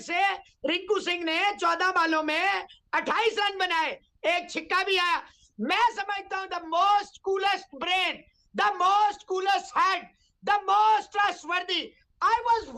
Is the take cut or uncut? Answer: uncut